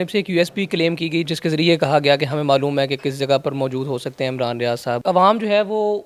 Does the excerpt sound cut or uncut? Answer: cut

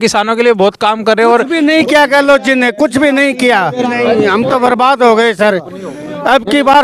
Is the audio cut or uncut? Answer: cut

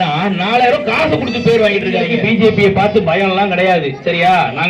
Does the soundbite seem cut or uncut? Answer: cut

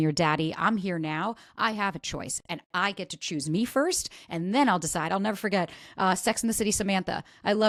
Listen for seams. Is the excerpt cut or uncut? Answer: uncut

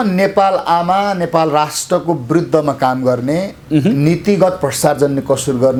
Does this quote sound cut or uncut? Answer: uncut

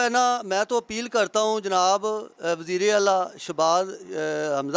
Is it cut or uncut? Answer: uncut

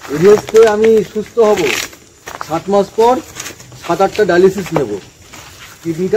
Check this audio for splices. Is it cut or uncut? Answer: uncut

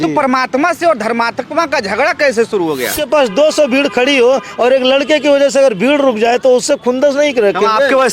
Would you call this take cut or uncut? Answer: cut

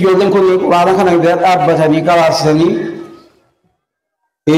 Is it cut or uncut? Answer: uncut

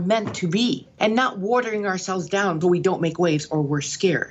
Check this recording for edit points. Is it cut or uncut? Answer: cut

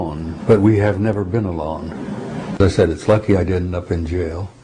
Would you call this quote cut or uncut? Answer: cut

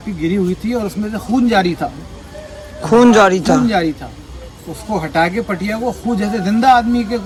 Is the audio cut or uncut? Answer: uncut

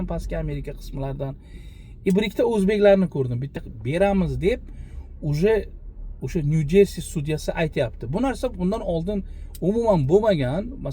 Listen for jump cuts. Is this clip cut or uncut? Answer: cut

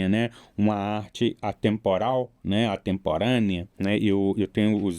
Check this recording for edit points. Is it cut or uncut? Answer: cut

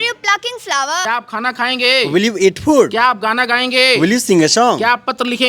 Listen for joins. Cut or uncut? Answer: cut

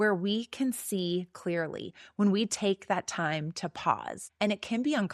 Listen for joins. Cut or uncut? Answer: cut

